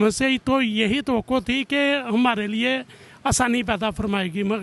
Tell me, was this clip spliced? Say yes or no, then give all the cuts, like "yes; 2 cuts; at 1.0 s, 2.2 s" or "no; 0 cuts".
no; 0 cuts